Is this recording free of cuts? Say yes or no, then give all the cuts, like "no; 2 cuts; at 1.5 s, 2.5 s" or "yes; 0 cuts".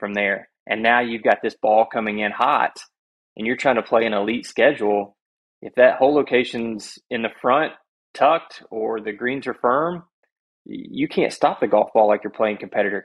yes; 0 cuts